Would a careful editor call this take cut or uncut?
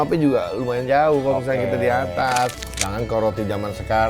cut